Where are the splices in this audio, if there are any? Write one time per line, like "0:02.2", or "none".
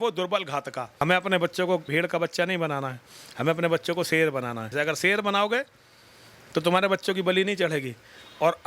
0:01.0
0:01.9
0:04.7